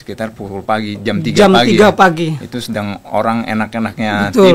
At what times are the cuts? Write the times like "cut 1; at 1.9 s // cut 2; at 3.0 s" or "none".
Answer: none

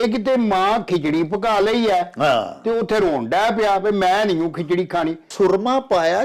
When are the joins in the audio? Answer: cut 1; at 5.3 s

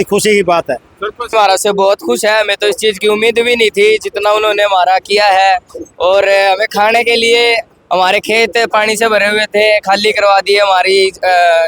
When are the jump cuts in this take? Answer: cut 1; at 1.3 s

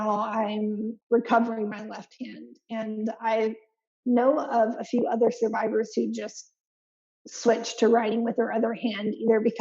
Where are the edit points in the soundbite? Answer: cut 1; at 0.9 s

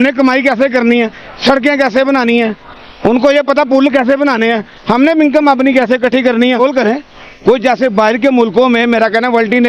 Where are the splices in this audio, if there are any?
cut 1; at 6.6 s

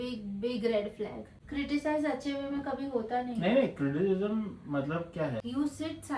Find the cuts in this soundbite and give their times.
cut 1; at 1.4 s // cut 2; at 5.4 s

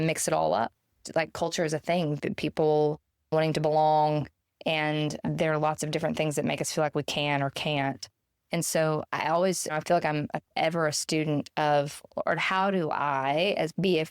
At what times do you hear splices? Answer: cut 1; at 1.0 s

